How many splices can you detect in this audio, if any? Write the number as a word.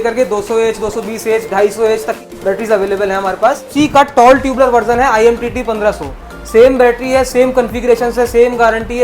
two